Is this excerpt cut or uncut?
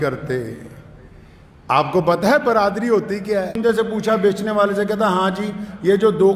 cut